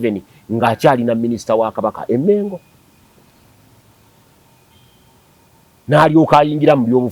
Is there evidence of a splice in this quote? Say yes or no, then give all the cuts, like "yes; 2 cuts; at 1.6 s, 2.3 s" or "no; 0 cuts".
no; 0 cuts